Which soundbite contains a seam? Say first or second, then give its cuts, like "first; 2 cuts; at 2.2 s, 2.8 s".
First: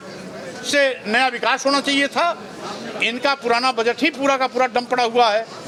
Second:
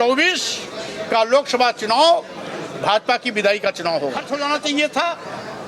second; 1 cut; at 4.2 s